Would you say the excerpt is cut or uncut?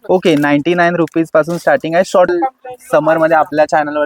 cut